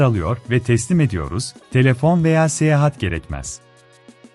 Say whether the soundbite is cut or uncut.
uncut